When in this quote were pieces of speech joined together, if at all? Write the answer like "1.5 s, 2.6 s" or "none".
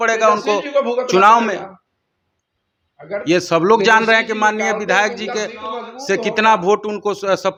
none